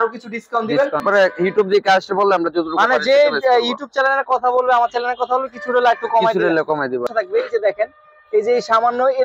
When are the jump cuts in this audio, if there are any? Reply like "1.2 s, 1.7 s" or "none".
1.0 s, 7.1 s